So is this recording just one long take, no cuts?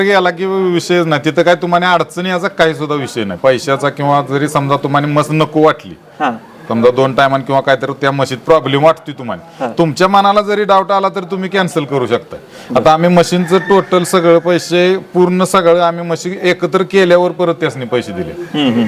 yes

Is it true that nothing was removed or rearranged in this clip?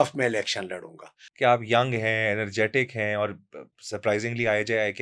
no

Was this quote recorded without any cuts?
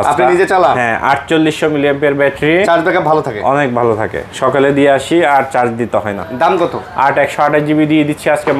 yes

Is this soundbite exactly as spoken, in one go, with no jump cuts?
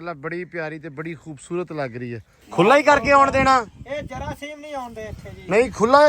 no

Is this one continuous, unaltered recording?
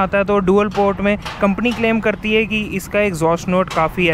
yes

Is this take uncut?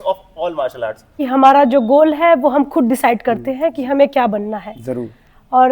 no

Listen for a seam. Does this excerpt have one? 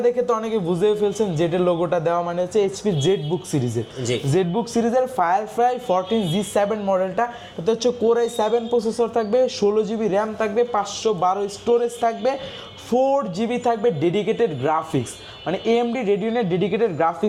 no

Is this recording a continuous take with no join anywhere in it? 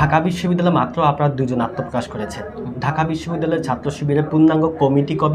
yes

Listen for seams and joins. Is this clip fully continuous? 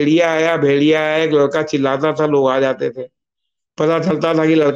yes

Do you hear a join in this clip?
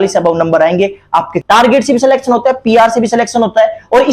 yes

